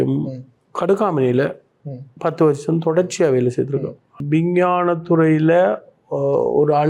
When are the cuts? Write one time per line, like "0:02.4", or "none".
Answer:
0:04.2